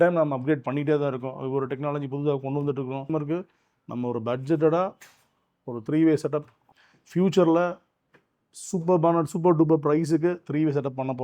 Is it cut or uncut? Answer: cut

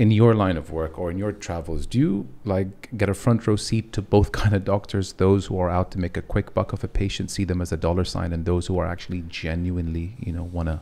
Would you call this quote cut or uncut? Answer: uncut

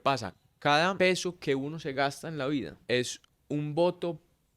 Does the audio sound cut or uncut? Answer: cut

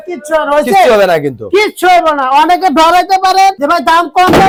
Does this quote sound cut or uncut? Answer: uncut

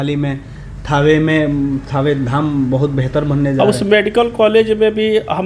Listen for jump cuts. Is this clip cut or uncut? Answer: uncut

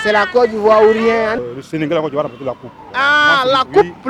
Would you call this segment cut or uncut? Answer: cut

